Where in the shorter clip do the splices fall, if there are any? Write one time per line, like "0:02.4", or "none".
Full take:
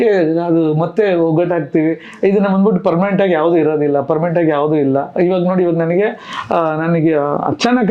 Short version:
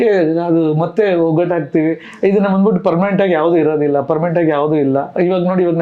none